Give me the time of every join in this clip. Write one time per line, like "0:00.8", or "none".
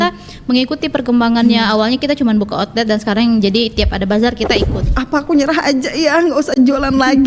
0:04.8